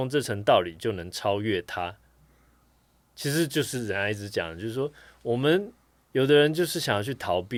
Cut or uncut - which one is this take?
uncut